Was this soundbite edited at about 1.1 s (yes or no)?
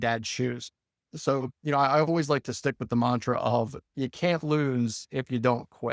no